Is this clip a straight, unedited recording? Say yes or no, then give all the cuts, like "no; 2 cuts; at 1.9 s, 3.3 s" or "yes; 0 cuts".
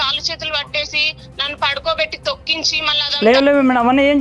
no; 1 cut; at 2.9 s